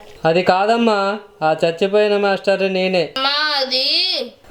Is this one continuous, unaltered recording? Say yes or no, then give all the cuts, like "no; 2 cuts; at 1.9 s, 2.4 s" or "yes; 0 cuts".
no; 1 cut; at 3.2 s